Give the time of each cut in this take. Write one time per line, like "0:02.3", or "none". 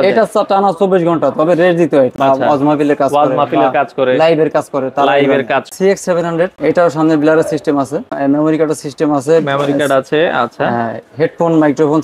0:02.1
0:05.7
0:06.6
0:08.1